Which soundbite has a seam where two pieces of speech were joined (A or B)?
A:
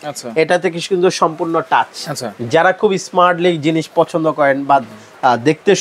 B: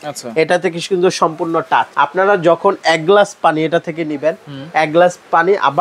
B